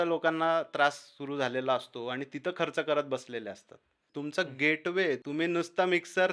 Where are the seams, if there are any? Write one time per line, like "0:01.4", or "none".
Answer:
0:04.1
0:05.2